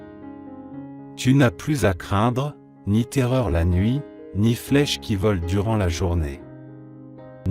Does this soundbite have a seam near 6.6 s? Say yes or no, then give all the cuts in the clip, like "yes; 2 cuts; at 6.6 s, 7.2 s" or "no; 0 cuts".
no; 1 cut; at 1.1 s